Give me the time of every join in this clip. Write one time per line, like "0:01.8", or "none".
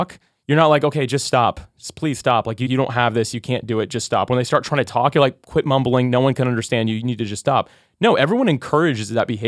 none